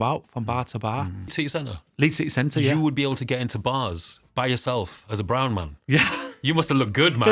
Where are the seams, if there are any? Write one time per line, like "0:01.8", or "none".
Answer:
0:01.3